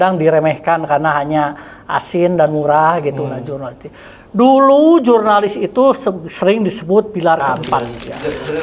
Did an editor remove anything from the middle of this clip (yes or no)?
yes